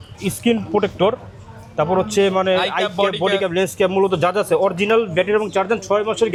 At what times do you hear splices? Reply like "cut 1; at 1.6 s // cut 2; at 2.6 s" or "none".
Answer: none